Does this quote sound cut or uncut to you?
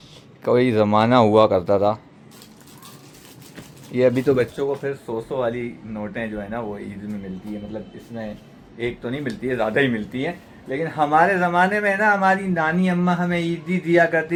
uncut